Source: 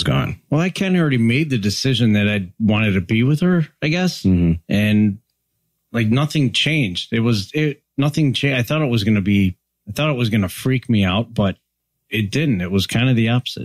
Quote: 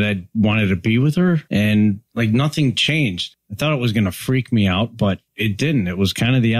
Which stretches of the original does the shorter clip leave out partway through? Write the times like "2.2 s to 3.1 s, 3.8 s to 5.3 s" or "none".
3.7 s to 4.6 s, 5.2 s to 5.8 s, 7.0 s to 9.6 s, 11.7 s to 12.0 s